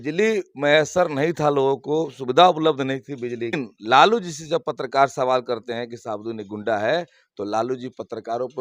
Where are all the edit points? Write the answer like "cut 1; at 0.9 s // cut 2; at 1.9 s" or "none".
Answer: cut 1; at 3.6 s